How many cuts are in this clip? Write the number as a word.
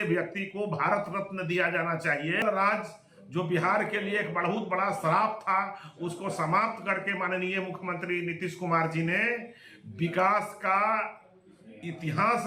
one